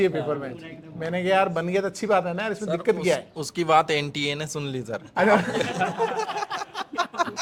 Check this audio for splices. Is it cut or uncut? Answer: uncut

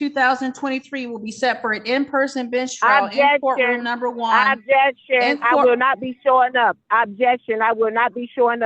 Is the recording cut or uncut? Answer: uncut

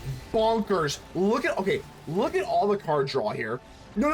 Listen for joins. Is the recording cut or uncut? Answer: uncut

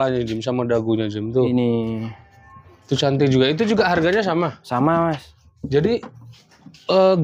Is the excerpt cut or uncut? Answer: uncut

